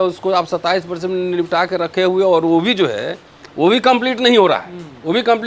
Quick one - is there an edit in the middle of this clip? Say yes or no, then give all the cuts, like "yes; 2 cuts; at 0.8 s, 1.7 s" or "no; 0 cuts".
no; 0 cuts